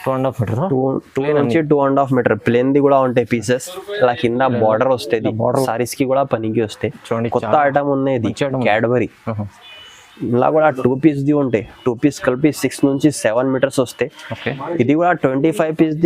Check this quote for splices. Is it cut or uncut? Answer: cut